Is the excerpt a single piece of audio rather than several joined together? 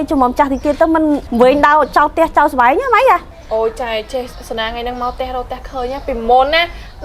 no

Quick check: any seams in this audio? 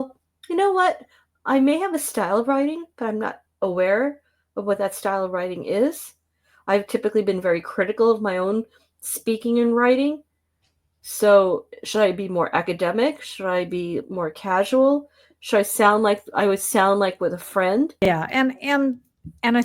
yes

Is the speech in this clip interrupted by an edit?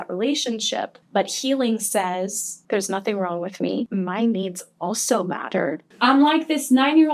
yes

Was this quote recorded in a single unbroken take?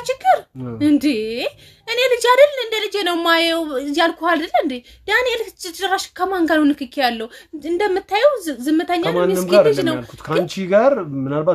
yes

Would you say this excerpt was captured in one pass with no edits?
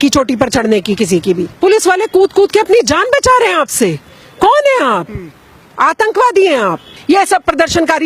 no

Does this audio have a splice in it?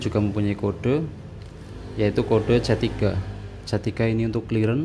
no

